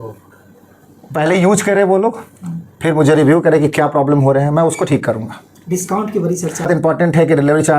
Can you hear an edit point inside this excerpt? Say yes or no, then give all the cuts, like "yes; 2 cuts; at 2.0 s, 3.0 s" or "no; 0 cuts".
yes; 1 cut; at 6.7 s